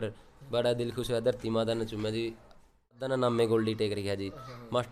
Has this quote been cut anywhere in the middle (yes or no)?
yes